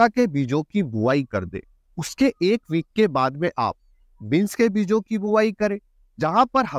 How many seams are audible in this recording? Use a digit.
0